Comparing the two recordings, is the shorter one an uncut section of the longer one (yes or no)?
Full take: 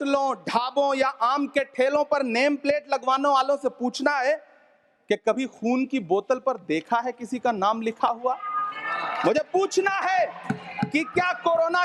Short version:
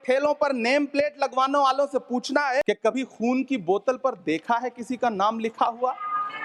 no